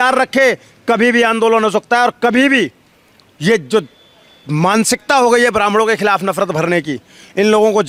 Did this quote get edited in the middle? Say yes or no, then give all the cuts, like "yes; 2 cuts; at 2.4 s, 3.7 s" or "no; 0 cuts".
no; 0 cuts